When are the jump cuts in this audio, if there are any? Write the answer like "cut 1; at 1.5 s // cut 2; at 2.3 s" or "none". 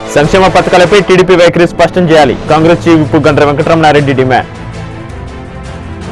none

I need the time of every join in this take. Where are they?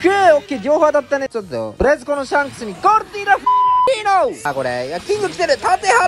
cut 1; at 1.3 s // cut 2; at 4.5 s

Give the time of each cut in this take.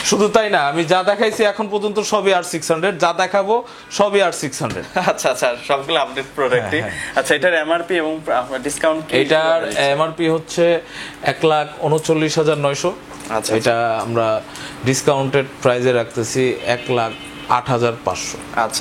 none

